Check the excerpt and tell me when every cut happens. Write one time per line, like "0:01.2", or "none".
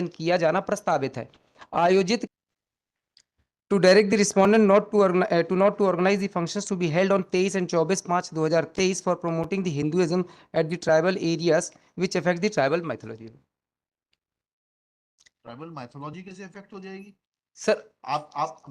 0:02.2